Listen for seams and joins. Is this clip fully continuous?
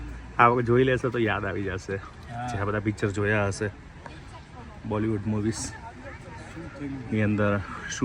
yes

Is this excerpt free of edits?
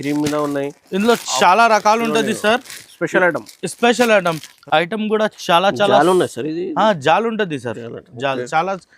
no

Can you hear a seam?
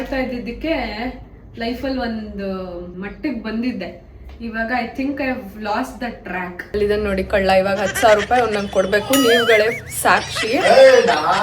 yes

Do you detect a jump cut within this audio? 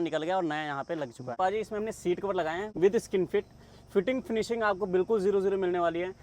yes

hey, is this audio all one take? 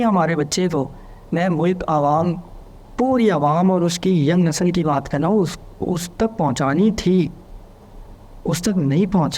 yes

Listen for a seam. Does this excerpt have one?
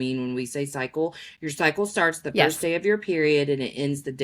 no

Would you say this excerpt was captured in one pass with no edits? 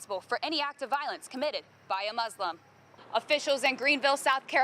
no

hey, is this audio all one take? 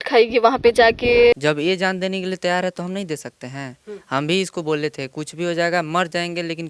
no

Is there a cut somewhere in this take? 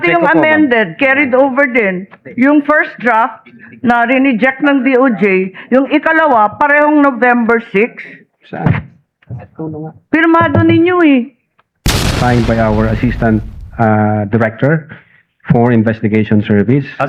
yes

